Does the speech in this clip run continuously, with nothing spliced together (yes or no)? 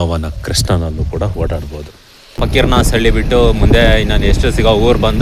no